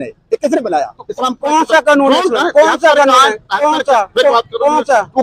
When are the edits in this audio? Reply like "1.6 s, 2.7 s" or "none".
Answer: none